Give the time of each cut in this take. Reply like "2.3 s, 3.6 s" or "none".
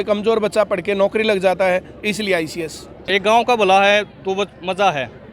3.1 s